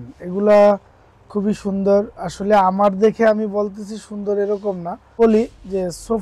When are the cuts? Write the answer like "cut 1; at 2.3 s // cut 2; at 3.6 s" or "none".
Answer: cut 1; at 5.2 s